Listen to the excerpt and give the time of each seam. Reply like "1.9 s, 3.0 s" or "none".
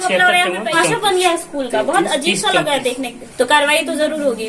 0.8 s, 3.1 s